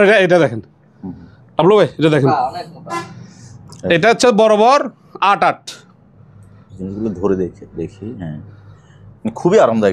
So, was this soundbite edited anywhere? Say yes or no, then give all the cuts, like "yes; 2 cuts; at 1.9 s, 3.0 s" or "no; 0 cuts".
no; 0 cuts